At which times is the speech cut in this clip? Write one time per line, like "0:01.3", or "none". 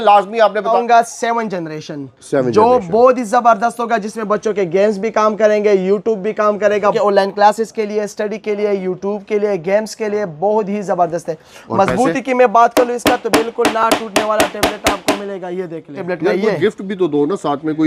0:00.7
0:07.0
0:16.0